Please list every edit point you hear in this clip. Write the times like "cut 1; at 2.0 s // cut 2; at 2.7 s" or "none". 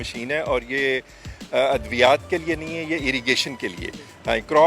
none